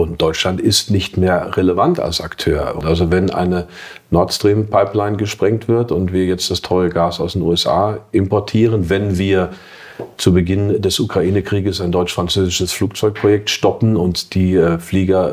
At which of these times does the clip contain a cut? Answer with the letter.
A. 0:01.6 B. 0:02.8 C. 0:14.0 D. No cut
B